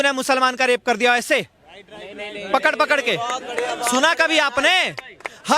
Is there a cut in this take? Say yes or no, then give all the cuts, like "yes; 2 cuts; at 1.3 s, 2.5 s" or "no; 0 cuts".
no; 0 cuts